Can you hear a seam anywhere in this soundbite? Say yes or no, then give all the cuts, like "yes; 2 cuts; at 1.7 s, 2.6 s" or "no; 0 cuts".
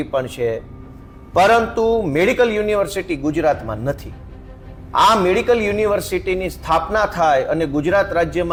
no; 0 cuts